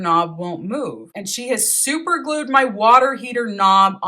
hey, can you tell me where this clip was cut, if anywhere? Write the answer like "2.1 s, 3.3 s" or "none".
1.1 s

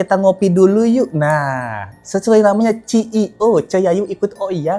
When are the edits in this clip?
none

